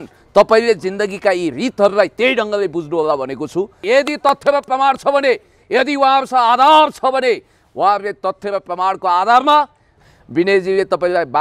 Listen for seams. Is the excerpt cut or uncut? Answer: cut